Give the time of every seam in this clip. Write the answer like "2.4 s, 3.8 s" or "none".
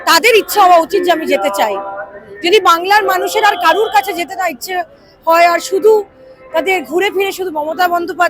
none